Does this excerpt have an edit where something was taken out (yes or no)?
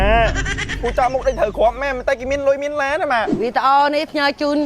yes